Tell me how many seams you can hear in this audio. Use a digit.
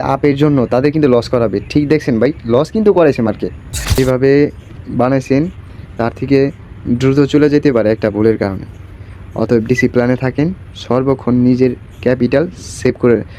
1